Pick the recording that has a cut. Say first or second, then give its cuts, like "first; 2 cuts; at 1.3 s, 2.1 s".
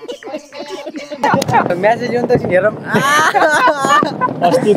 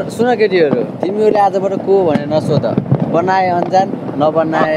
first; 1 cut; at 1.7 s